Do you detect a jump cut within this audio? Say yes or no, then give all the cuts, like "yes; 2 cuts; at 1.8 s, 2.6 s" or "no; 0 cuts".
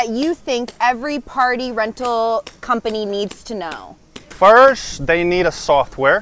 no; 0 cuts